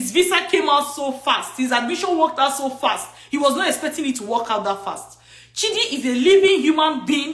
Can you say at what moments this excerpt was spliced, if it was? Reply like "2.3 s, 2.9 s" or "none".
none